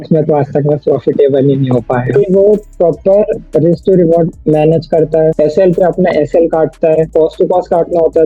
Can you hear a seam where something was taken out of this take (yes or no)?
yes